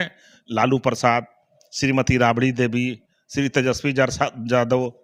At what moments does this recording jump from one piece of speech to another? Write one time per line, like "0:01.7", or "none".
none